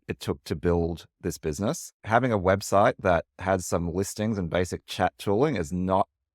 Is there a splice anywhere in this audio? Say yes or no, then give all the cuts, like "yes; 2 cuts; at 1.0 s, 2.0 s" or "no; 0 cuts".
yes; 1 cut; at 1.9 s